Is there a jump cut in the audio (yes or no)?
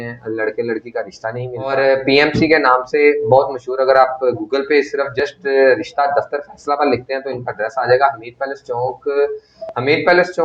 yes